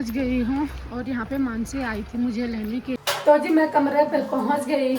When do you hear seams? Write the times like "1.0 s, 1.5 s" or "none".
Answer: 3.0 s